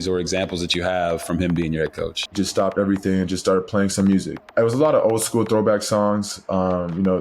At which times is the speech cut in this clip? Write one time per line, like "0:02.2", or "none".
0:02.4
0:04.4